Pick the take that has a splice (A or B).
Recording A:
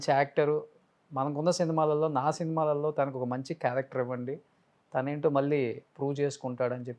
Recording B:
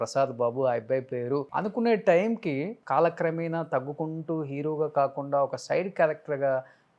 B